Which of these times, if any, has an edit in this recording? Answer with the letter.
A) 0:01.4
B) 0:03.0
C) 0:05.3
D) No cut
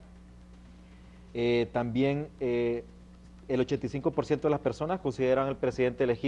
C